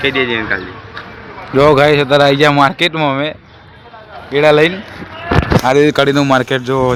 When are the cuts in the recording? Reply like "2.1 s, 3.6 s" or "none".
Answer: none